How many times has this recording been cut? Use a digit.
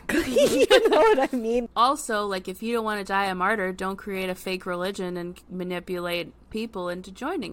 2